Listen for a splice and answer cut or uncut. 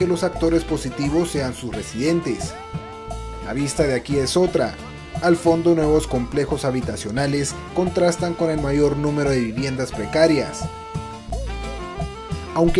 cut